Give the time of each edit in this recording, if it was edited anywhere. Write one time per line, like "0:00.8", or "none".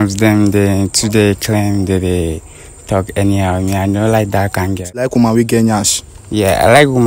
0:05.0